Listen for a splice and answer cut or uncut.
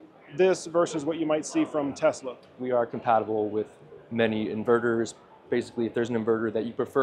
cut